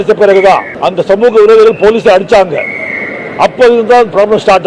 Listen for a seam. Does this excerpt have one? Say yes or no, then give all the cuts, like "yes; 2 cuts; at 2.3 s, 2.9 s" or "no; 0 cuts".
no; 0 cuts